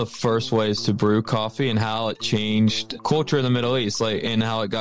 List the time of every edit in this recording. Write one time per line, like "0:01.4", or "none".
0:02.9